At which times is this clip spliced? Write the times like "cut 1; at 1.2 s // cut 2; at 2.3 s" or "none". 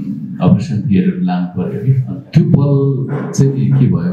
cut 1; at 2.1 s // cut 2; at 3.2 s